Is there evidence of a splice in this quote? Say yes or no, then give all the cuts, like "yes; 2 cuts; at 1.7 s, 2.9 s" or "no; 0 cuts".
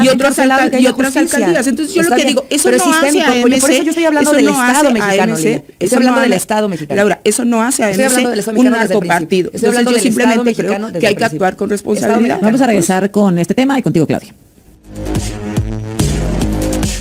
no; 0 cuts